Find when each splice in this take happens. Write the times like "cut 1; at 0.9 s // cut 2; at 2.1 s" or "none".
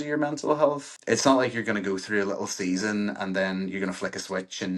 cut 1; at 0.9 s